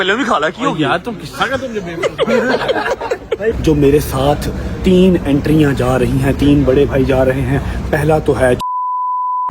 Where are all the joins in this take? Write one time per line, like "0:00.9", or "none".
0:03.6